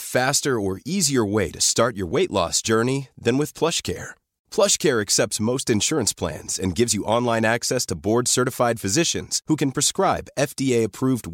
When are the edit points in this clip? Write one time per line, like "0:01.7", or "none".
none